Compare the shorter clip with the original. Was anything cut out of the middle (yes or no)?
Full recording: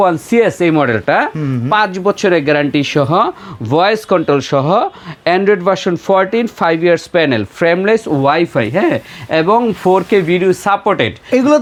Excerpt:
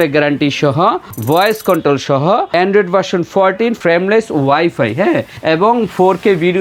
yes